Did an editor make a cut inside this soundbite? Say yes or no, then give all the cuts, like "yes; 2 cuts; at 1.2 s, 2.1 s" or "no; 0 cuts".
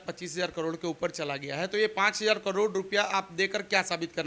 no; 0 cuts